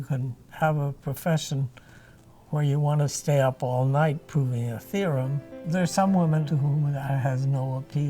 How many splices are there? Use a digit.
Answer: 2